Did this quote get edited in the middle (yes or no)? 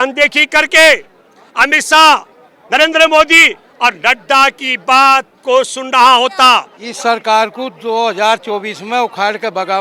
yes